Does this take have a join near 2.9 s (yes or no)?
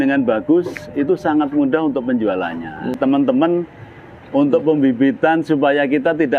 yes